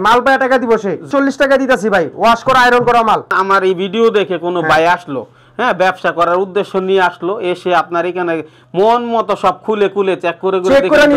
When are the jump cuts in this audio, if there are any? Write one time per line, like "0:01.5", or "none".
0:01.1
0:03.3